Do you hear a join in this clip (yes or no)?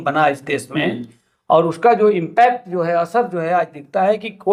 no